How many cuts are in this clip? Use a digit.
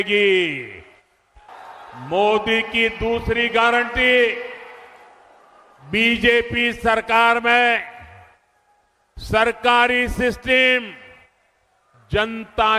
1